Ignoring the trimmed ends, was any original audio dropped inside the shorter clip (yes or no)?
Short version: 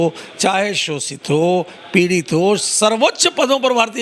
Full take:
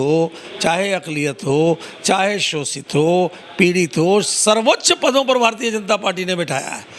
no